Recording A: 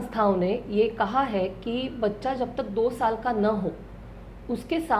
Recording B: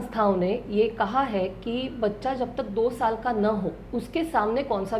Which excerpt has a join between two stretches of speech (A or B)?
B